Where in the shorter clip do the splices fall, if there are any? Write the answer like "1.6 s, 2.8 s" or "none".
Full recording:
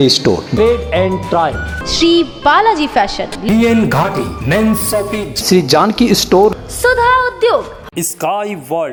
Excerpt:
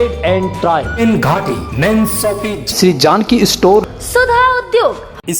1.0 s